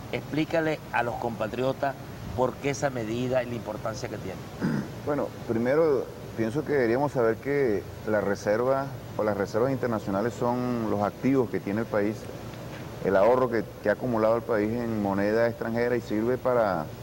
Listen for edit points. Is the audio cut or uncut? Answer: uncut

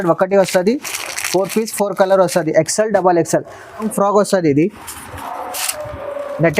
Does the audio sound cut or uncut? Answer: cut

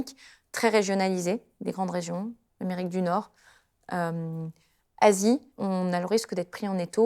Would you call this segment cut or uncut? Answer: cut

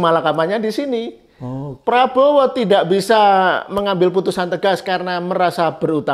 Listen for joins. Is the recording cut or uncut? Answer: uncut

